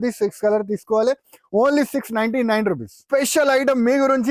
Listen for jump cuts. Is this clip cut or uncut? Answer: cut